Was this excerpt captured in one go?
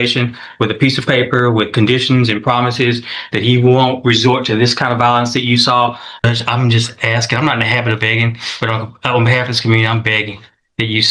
no; 1 cut; at 6.1 s

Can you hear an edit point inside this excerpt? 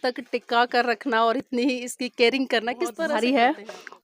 yes; 1 cut; at 3.0 s

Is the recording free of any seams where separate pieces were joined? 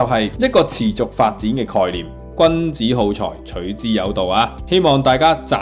no; 1 cut; at 2.2 s

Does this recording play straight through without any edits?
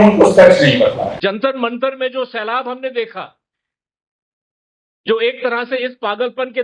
no; 1 cut; at 1.1 s

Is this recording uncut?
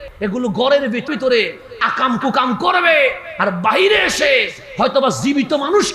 no; 1 cut; at 1.1 s

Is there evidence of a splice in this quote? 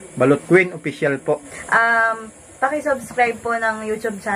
yes; 1 cut; at 1.6 s

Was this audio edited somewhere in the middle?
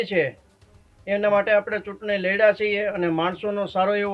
no; 0 cuts

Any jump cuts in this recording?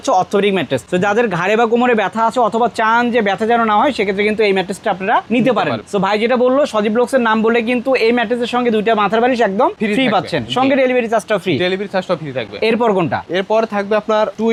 no; 0 cuts

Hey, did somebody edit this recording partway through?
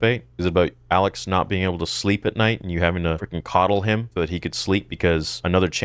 no; 0 cuts

